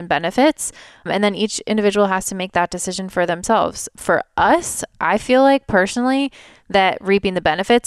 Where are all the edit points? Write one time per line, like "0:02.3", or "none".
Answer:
0:01.1
0:03.9